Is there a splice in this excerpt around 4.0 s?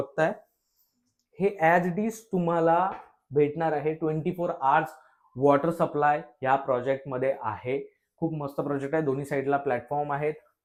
no; 0 cuts

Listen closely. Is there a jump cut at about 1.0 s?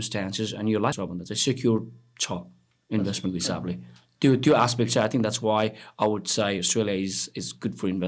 yes; 1 cut; at 1.0 s

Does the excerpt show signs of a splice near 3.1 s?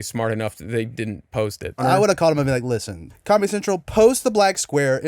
yes; 2 cuts; at 1.8 s, 3.1 s

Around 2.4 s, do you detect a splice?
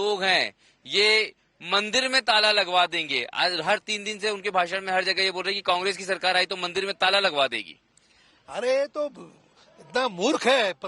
yes; 1 cut; at 2.4 s

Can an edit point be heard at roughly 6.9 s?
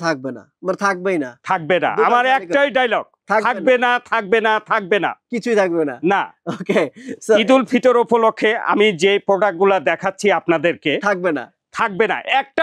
no; 0 cuts

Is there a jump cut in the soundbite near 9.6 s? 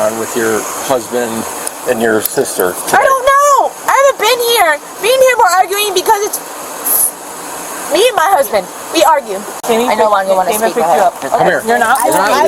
yes; 1 cut; at 9.6 s

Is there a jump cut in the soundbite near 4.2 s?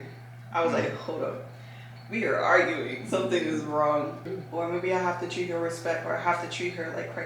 yes; 1 cut; at 4.2 s

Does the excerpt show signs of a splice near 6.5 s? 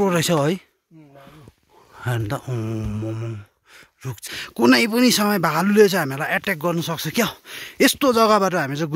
no; 1 cut; at 4.2 s

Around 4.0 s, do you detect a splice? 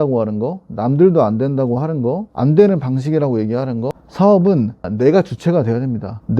yes; 1 cut; at 4.0 s

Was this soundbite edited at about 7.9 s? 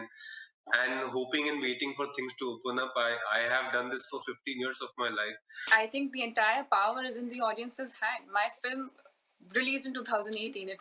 no; 1 cut; at 5.7 s

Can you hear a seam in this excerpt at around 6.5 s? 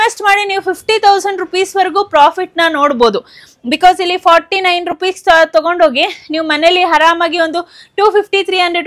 no; 0 cuts

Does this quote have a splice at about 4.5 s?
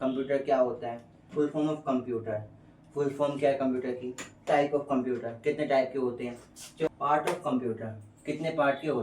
yes; 3 cuts; at 1.2 s, 4.5 s, 6.9 s

